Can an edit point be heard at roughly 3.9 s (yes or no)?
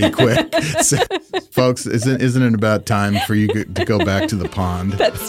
no